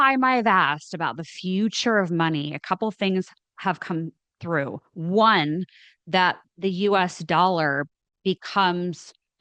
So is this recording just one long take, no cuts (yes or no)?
yes